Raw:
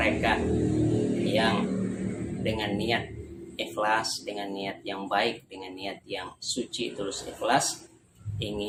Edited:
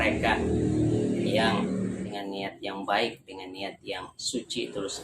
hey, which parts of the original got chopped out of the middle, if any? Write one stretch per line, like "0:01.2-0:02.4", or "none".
0:02.1-0:04.3